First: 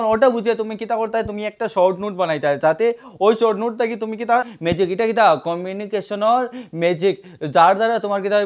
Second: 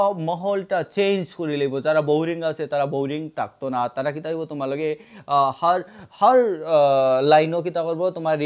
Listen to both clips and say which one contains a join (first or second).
first